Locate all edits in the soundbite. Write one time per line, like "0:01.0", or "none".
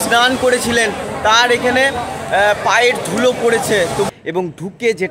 0:04.1